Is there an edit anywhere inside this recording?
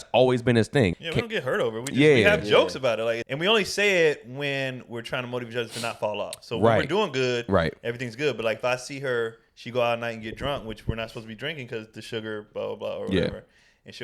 yes; 2 cuts; at 1.0 s, 3.2 s

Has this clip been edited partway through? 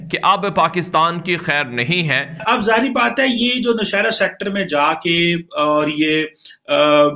yes; 1 cut; at 2.4 s

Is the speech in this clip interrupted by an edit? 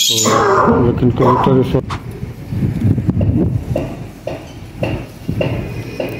yes; 1 cut; at 1.8 s

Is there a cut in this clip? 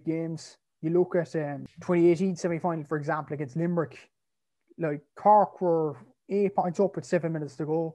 yes; 1 cut; at 1.7 s

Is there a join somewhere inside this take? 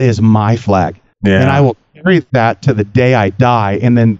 yes; 2 cuts; at 1.0 s, 2.3 s

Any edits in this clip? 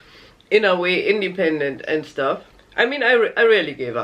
yes; 1 cut; at 2.6 s

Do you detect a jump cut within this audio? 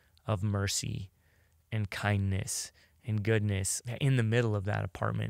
yes; 1 cut; at 3.8 s

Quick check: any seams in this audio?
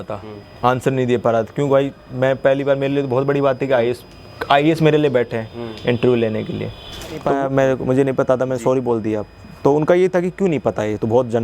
yes; 1 cut; at 7.2 s

